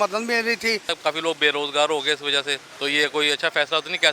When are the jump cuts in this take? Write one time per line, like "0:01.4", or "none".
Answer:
0:00.9
0:02.6